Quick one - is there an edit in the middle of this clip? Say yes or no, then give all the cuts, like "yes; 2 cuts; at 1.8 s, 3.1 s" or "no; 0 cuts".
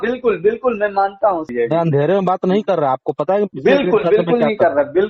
yes; 1 cut; at 1.5 s